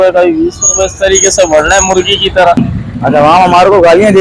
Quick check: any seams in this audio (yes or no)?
yes